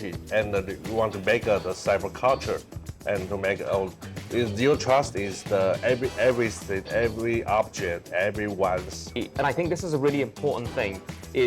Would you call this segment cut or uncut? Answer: cut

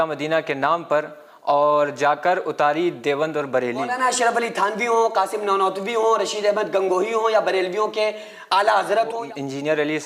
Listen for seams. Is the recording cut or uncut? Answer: cut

